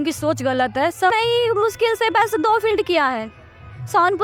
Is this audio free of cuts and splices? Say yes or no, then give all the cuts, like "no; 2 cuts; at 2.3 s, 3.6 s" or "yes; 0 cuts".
no; 1 cut; at 1.1 s